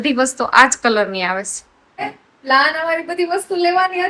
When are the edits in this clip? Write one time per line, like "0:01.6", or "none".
0:02.0